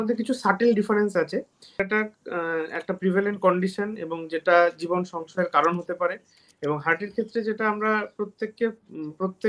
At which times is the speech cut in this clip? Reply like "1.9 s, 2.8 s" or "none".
1.7 s